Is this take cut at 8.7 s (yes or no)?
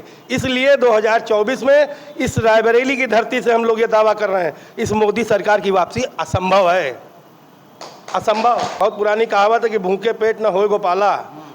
yes